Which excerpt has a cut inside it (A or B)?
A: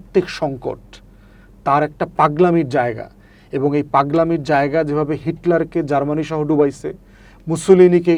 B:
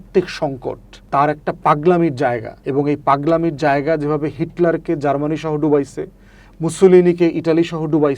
B